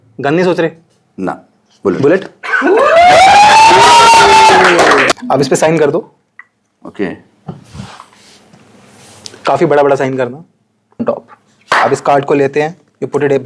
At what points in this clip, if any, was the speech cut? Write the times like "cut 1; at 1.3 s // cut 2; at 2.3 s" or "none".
cut 1; at 5.1 s // cut 2; at 11.0 s